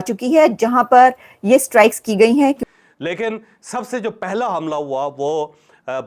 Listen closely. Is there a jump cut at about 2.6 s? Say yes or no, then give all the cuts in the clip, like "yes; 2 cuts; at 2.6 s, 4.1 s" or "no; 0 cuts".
yes; 1 cut; at 2.6 s